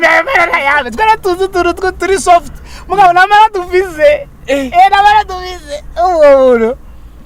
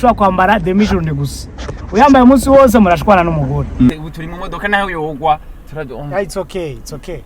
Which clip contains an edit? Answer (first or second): second